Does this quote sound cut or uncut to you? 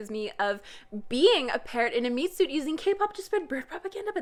uncut